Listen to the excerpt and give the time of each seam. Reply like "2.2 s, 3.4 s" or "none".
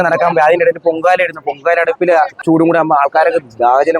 2.4 s